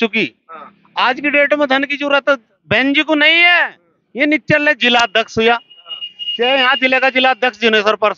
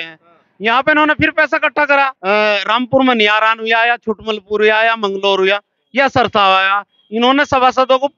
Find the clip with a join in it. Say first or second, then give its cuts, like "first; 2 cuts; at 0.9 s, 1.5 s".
second; 1 cut; at 2.2 s